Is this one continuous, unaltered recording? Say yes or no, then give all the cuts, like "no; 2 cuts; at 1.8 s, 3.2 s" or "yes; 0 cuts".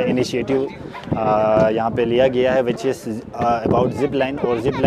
yes; 0 cuts